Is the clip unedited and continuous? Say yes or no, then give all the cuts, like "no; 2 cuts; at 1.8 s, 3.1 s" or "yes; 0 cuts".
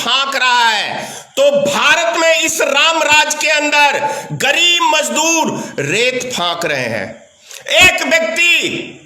yes; 0 cuts